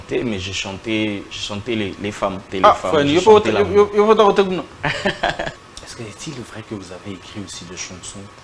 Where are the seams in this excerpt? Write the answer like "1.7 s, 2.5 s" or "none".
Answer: 2.5 s, 5.6 s